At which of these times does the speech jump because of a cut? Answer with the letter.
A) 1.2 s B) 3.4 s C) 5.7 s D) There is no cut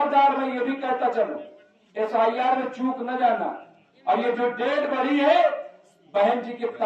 D